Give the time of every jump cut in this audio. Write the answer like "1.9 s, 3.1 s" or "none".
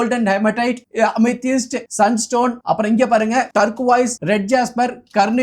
0.8 s, 1.8 s, 2.6 s, 4.0 s